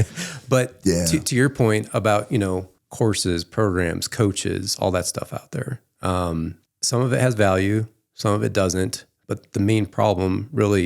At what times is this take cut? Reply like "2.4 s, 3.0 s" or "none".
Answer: 2.8 s, 6.7 s